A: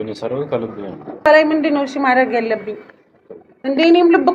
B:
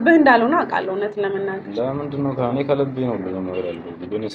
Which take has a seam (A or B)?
A